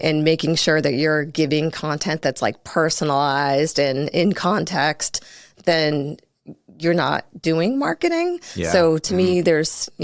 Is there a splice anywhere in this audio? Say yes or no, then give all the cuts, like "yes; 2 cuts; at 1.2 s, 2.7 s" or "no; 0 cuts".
no; 0 cuts